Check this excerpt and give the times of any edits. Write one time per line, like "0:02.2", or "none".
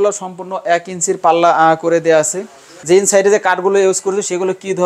0:02.7